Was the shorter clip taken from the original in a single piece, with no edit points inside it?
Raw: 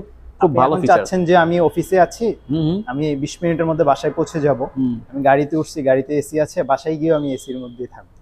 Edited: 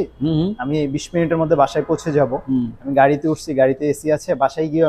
yes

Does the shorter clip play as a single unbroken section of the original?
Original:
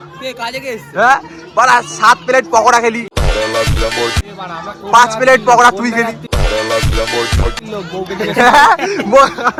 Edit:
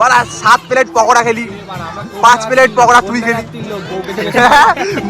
no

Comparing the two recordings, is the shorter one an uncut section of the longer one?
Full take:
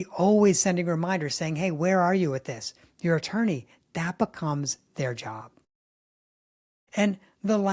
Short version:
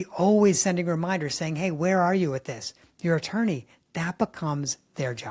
yes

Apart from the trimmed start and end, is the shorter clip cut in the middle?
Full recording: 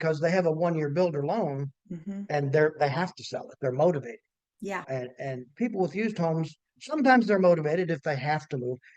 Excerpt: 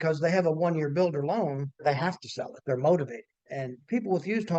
yes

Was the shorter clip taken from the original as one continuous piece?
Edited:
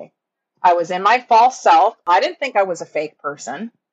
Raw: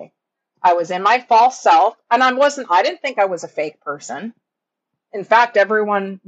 no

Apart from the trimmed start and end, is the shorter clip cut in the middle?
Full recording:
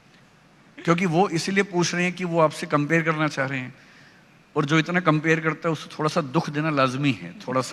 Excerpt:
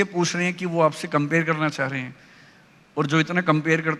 no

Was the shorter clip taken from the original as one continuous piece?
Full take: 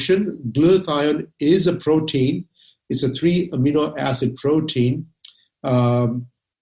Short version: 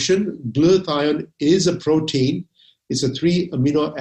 yes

